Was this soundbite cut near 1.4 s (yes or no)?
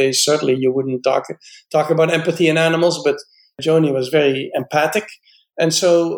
no